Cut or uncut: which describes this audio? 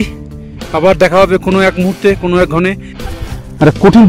cut